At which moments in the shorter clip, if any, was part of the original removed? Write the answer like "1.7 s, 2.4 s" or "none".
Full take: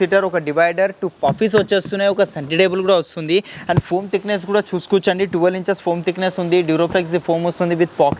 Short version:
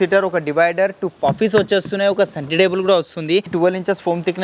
3.5 s

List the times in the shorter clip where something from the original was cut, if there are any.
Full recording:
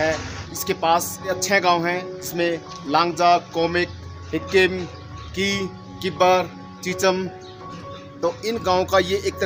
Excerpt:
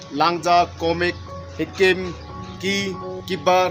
none

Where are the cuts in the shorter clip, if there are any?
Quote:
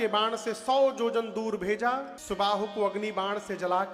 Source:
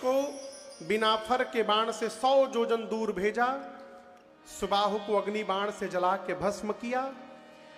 2.1 s

